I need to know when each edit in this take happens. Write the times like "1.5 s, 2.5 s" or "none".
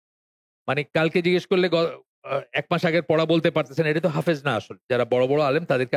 4.8 s